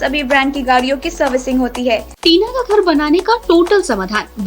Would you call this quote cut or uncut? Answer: cut